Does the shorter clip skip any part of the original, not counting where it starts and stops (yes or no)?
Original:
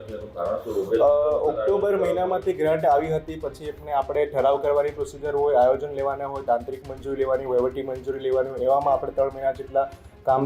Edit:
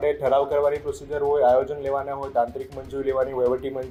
no